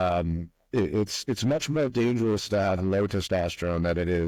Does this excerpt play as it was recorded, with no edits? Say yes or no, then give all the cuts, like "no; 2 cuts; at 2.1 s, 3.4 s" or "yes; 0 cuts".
yes; 0 cuts